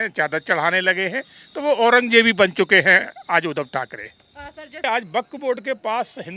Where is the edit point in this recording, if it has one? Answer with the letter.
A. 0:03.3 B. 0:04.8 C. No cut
B